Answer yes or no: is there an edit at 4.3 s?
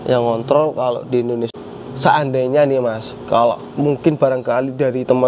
no